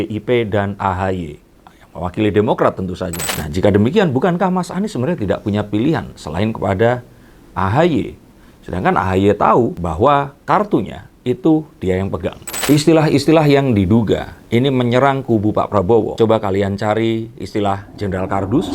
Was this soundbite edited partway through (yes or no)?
yes